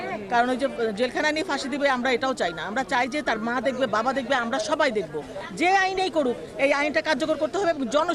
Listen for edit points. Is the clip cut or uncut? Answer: cut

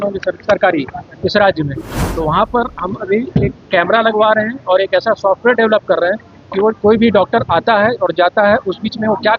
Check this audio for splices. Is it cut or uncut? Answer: uncut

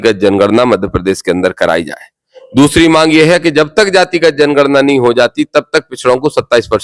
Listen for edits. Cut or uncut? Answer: uncut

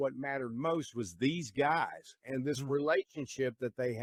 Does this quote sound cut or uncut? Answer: uncut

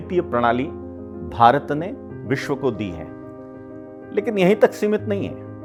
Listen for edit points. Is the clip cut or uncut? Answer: uncut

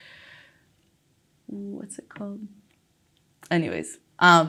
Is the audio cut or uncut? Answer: uncut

